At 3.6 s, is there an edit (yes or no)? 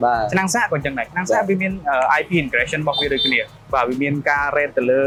no